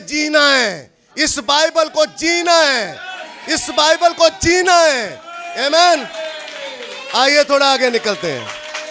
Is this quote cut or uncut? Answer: uncut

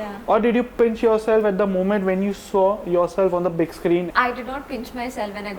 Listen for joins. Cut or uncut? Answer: cut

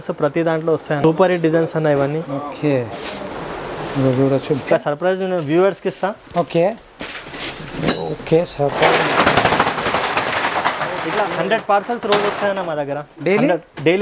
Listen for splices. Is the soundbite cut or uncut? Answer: cut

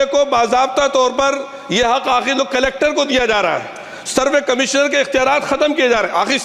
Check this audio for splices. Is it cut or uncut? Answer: uncut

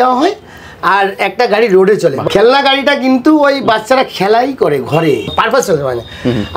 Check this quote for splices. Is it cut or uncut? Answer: cut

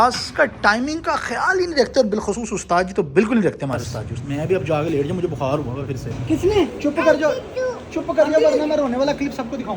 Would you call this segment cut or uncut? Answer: cut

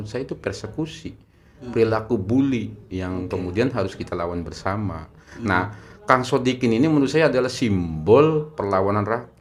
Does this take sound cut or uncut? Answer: uncut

